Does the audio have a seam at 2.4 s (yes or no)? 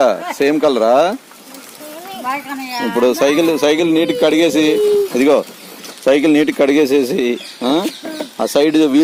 no